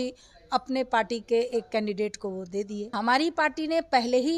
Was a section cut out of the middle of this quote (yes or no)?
yes